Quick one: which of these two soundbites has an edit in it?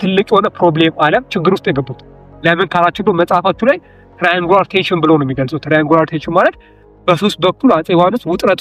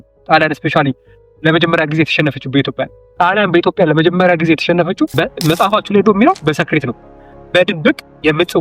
second; 1 cut; at 5.1 s

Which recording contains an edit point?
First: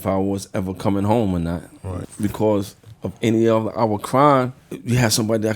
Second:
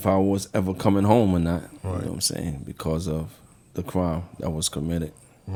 first; 2 cuts; at 2.1 s, 4.7 s

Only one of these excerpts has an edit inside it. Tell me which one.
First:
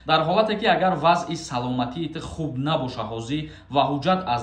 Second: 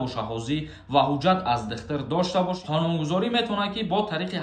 second; 1 cut; at 2.6 s

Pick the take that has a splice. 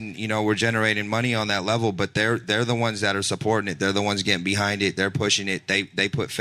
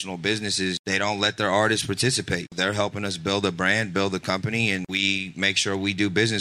second; 3 cuts; at 0.8 s, 2.5 s, 4.9 s

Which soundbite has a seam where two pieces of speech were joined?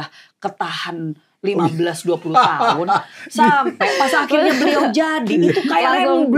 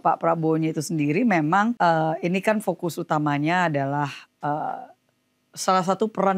second; 1 cut; at 1.8 s

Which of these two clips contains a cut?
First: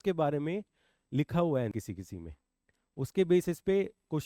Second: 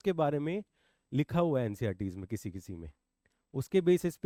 first; 1 cut; at 1.7 s

